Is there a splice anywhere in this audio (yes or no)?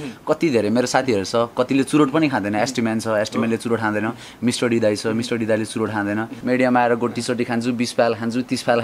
yes